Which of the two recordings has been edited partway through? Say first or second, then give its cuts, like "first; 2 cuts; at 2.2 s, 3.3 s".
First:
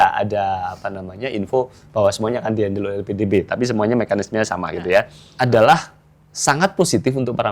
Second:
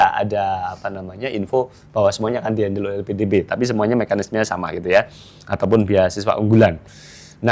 first; 1 cut; at 5.2 s